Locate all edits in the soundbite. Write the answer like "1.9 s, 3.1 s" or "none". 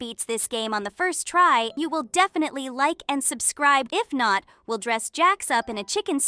1.8 s, 3.9 s